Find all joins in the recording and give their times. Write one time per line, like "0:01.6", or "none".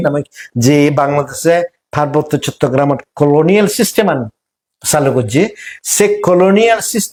none